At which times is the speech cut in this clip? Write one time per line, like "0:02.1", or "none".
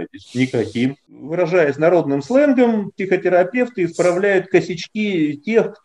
0:01.1

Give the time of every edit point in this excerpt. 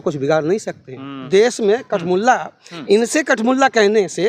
0:01.2

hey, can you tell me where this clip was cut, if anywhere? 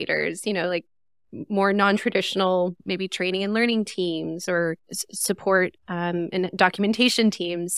0:02.8

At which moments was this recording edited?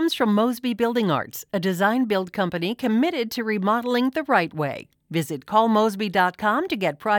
none

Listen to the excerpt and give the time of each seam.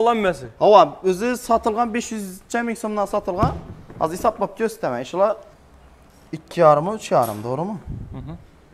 0:05.5

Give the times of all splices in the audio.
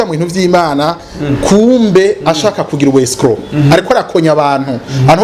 none

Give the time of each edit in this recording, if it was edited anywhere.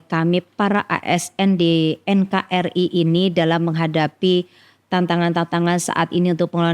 none

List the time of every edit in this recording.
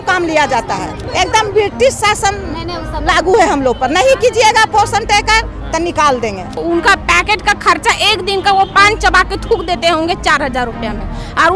0:01.0
0:06.6

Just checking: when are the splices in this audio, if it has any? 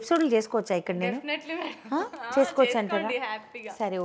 none

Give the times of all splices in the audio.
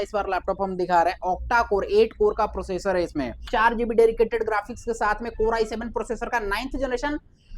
0:03.4

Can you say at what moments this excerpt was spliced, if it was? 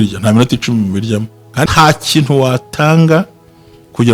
0:01.7

